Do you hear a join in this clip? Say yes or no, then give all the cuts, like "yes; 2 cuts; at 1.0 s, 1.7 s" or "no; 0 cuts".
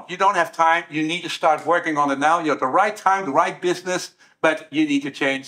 no; 0 cuts